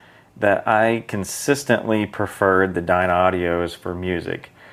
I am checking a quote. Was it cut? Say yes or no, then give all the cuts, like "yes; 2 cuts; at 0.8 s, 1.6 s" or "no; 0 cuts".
no; 0 cuts